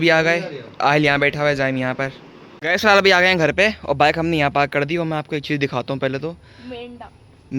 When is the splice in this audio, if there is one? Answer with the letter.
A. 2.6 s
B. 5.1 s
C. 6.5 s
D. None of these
A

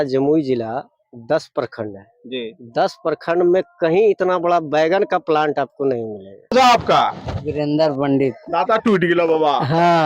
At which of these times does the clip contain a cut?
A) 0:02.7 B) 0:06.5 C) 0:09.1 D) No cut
B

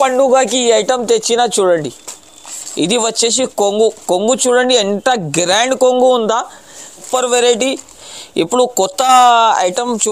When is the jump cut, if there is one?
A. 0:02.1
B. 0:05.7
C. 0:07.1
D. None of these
C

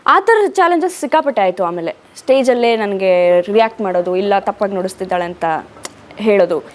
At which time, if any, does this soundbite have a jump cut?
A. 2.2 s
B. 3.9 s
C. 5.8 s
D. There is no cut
D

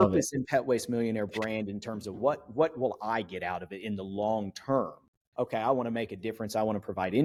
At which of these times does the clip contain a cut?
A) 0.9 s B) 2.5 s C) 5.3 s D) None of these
D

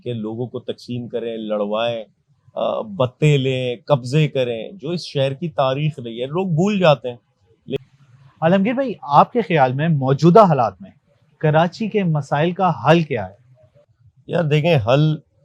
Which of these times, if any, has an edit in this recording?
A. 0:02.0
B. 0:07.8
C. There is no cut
B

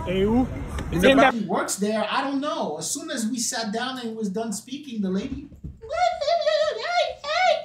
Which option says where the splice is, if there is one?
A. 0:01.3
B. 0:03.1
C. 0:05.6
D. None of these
A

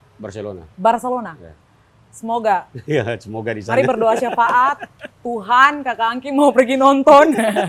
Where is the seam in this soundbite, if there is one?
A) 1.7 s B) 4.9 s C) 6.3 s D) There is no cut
D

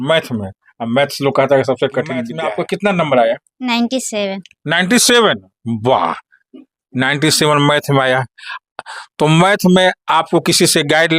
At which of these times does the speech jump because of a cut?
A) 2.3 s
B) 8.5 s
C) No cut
A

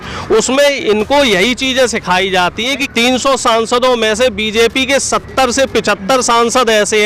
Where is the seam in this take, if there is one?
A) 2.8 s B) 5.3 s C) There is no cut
A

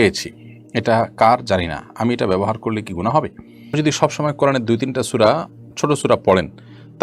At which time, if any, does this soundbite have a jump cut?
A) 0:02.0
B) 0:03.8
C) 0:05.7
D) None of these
B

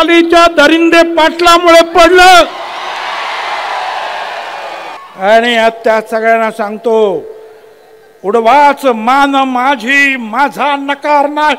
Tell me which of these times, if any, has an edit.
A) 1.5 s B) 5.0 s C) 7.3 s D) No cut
B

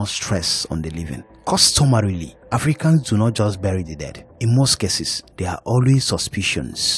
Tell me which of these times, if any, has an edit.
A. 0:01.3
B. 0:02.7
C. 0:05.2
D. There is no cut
A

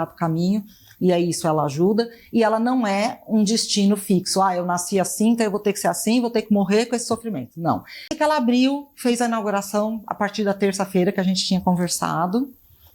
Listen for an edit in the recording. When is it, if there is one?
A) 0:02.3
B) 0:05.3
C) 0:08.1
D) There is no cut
C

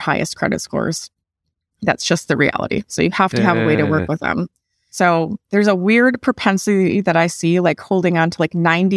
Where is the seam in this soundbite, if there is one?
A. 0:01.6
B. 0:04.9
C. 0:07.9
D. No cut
B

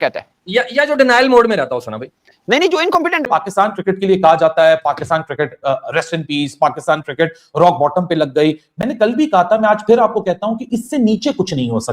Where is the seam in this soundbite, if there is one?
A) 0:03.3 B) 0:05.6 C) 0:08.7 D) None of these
A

